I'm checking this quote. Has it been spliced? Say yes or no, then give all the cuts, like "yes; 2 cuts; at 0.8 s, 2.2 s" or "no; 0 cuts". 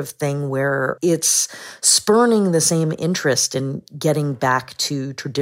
yes; 1 cut; at 1.0 s